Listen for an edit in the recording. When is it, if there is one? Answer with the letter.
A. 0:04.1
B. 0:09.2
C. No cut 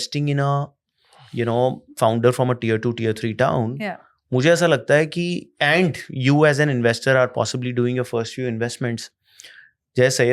C